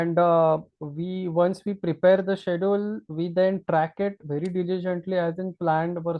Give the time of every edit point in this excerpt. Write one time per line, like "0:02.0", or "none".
none